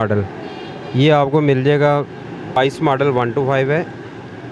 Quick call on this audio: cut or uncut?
cut